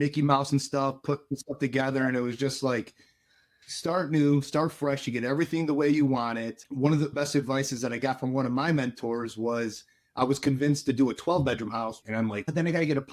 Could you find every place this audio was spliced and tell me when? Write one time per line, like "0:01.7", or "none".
0:12.0